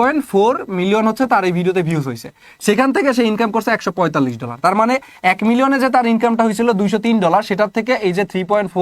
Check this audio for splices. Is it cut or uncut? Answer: uncut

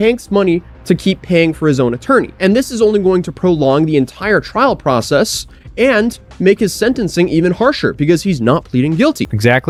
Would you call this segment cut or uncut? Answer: uncut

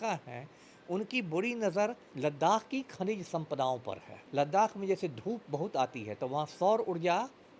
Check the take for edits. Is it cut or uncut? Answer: cut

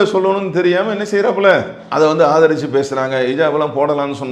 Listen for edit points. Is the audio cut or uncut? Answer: uncut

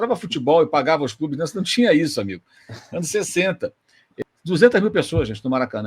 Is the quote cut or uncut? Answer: cut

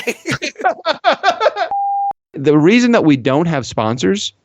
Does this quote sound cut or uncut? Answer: cut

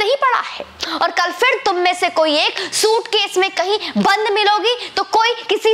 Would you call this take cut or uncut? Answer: uncut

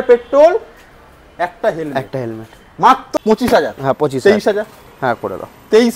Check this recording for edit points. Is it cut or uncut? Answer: cut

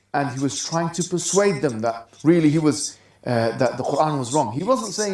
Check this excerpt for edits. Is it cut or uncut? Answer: cut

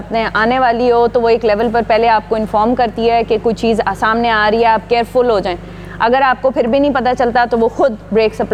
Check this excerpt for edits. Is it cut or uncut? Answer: uncut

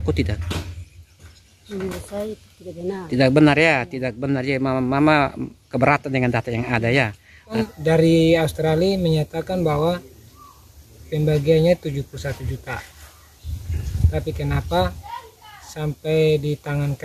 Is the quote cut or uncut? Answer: cut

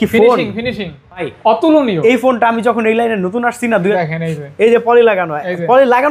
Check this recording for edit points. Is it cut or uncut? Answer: cut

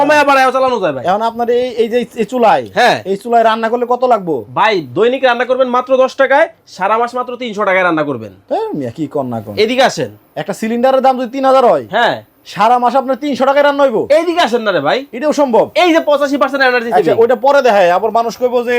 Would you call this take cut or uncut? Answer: uncut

